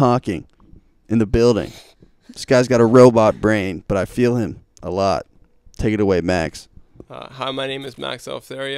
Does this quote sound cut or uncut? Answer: uncut